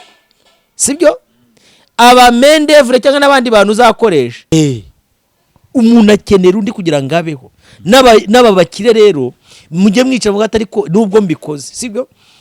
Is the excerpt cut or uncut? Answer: cut